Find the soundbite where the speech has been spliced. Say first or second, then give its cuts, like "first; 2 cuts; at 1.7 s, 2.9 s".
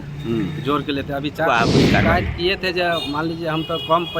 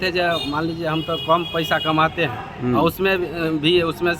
first; 1 cut; at 1.5 s